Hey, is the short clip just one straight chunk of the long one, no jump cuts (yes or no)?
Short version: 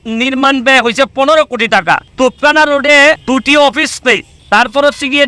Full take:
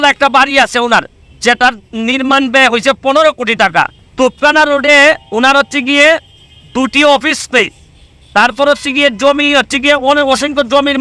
no